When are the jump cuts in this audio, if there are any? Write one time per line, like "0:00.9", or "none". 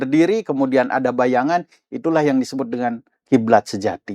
0:03.2

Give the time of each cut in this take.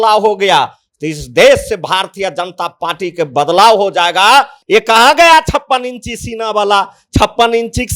0:04.6

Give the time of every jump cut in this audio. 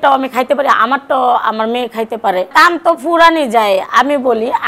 0:02.5

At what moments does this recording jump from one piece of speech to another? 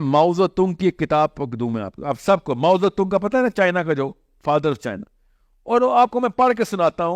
none

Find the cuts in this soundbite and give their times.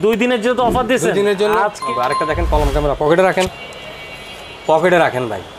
0:01.8

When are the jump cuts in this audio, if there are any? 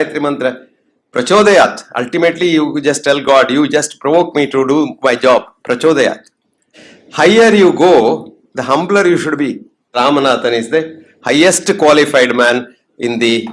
0:06.7
0:09.8

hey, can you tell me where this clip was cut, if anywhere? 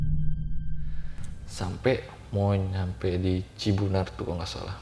0:01.0

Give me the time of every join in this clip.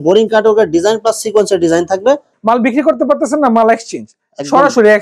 0:02.3

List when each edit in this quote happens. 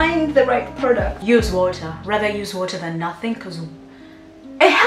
0:01.1

